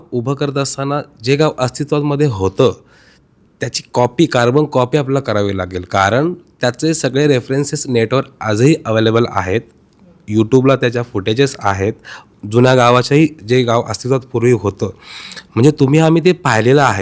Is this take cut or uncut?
uncut